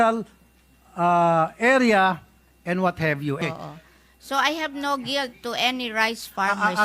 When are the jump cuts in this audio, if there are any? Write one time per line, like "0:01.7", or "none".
0:03.4